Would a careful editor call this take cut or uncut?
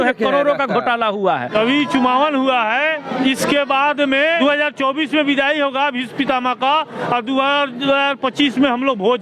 cut